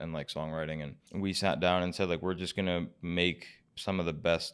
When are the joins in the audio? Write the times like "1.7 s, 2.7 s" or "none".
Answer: 1.0 s

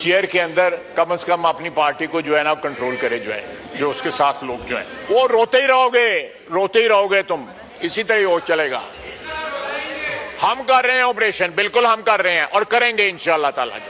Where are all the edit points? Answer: 4.9 s, 10.3 s

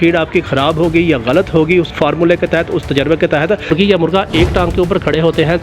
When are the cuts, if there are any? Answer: 1.9 s, 3.7 s

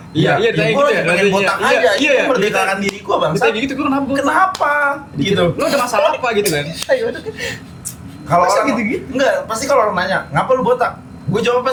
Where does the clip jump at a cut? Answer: none

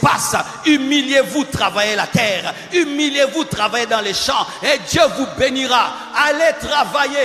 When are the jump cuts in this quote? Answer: none

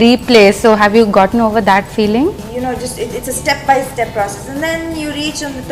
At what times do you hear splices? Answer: 2.4 s

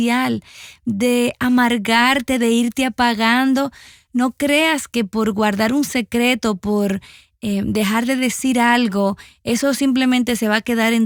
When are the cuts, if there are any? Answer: none

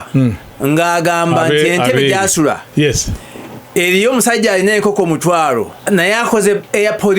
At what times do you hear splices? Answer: 5.8 s

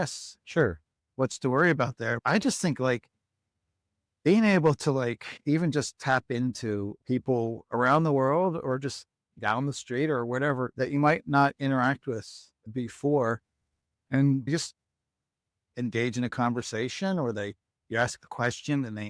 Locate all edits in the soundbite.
2.2 s, 14.5 s

